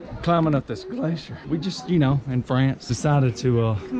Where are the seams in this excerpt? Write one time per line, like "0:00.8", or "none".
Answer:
0:01.3
0:02.9